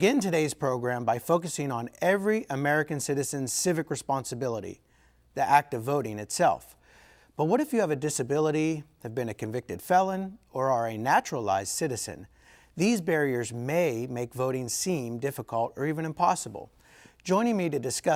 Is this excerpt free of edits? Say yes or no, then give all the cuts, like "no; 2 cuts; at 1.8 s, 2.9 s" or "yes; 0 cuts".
yes; 0 cuts